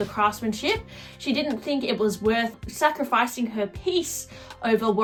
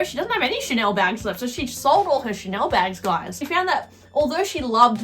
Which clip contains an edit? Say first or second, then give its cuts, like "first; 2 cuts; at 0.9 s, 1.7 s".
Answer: second; 1 cut; at 3.4 s